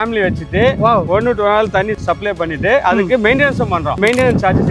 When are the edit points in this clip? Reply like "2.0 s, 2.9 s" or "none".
none